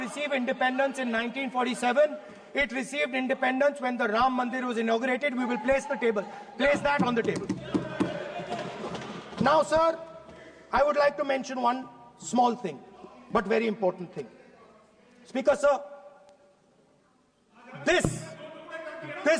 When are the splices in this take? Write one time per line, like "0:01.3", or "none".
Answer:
none